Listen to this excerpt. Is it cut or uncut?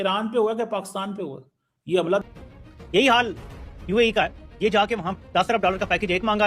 cut